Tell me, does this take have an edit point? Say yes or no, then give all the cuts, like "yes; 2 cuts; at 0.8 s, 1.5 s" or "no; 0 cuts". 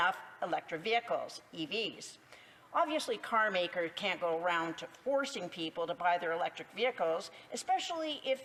no; 0 cuts